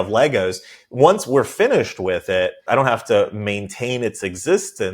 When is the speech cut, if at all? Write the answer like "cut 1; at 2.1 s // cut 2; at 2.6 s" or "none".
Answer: cut 1; at 2.6 s